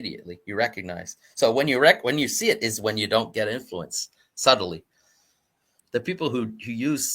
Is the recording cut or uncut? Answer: cut